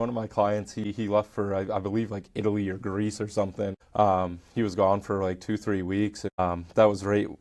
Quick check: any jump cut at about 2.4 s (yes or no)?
no